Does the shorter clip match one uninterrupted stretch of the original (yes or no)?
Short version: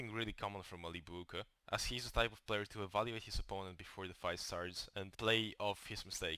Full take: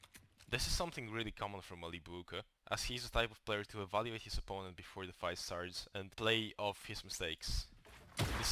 yes